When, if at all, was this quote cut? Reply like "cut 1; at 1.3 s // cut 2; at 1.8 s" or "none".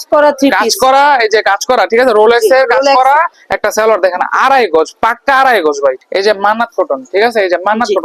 cut 1; at 3.4 s // cut 2; at 6.0 s